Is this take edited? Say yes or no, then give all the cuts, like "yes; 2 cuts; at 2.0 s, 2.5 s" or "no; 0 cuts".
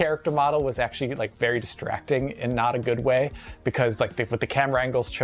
yes; 1 cut; at 3.5 s